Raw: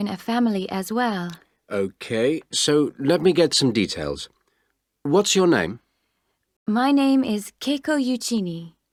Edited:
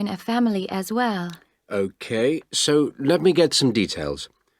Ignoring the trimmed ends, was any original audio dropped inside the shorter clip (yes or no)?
no